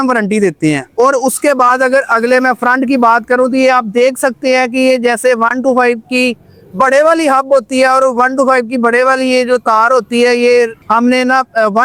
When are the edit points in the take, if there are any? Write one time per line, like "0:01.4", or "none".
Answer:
none